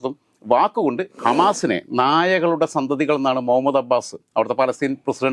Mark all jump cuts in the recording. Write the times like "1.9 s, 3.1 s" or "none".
1.2 s